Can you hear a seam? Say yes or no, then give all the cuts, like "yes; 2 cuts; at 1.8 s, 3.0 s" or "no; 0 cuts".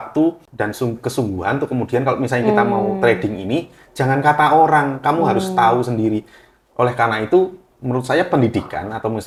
no; 0 cuts